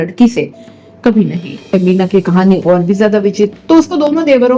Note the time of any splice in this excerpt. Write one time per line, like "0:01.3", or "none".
0:01.7
0:03.5